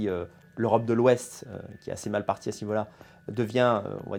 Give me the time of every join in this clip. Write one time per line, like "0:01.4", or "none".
none